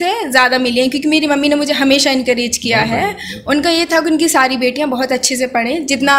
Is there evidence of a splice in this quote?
no; 0 cuts

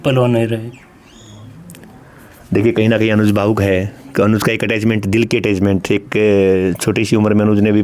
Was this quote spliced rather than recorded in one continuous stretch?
no; 0 cuts

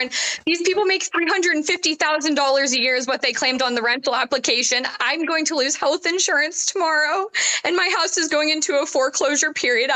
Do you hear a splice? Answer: no; 0 cuts

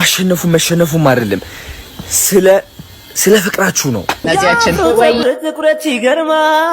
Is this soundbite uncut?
no; 1 cut; at 4.2 s

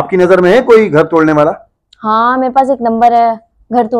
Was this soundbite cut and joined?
no; 0 cuts

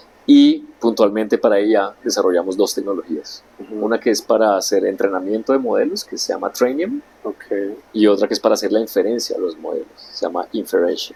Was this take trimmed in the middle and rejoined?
no; 0 cuts

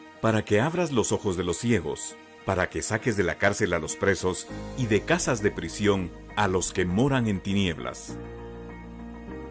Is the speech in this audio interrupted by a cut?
yes; 1 cut; at 5.3 s

